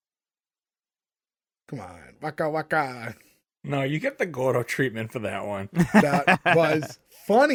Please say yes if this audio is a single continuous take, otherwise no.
yes